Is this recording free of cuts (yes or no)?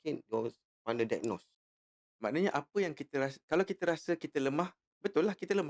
no